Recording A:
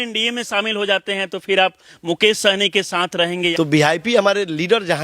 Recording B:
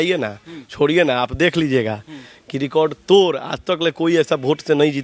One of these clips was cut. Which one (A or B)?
A